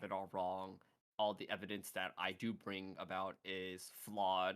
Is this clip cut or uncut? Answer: uncut